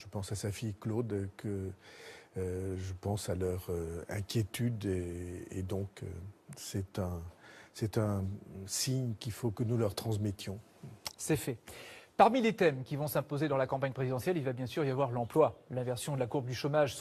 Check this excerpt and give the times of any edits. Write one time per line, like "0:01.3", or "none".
0:13.5

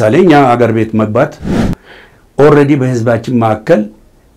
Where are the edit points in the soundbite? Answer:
0:01.8

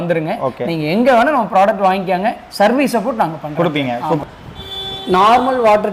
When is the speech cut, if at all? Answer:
0:04.2

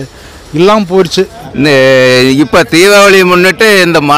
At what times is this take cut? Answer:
0:01.4

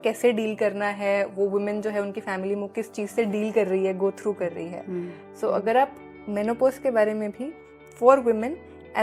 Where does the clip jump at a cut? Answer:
none

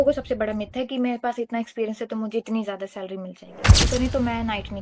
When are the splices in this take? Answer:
0:03.8

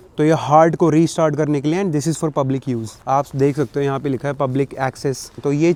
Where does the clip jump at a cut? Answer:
none

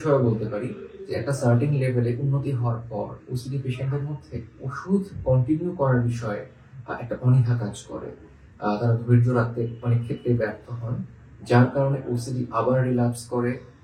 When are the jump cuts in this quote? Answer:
none

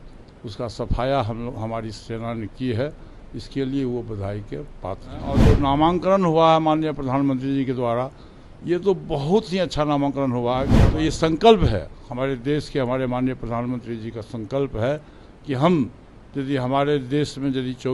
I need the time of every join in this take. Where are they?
0:05.4
0:10.7

